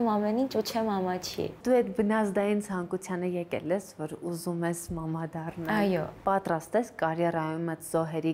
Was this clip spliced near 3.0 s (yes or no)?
no